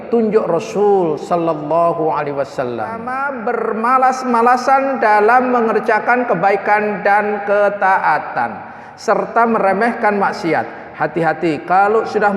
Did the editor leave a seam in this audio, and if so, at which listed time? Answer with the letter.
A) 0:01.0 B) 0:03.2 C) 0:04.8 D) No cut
B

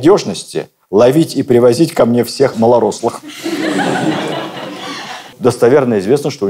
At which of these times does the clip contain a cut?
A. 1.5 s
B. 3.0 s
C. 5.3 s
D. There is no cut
C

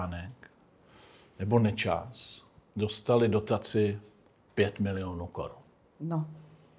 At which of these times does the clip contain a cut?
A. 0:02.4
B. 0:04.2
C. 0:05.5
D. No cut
D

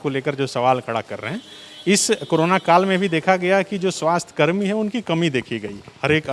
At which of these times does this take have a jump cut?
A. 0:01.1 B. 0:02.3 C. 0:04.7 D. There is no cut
D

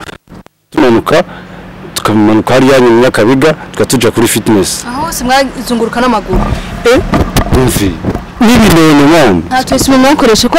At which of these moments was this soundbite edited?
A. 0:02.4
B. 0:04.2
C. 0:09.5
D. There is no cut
C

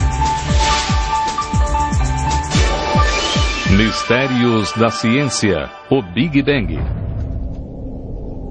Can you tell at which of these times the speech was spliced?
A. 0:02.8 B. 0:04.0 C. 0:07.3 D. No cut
D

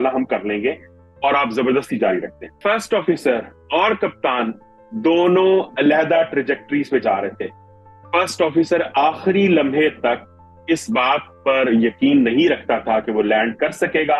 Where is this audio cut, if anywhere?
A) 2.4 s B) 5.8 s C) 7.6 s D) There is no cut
A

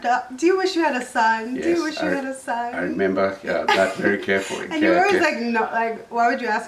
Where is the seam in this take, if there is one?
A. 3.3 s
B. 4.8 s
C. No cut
C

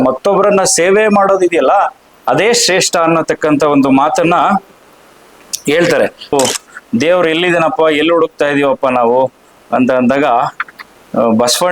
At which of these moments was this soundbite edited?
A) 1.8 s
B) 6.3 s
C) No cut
B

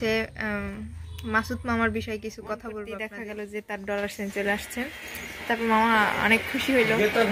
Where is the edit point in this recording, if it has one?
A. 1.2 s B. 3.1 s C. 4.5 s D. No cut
B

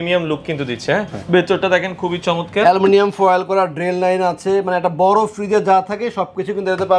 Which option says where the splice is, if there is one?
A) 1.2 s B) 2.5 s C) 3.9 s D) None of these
A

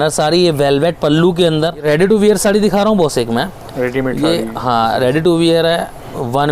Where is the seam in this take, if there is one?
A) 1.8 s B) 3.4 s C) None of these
A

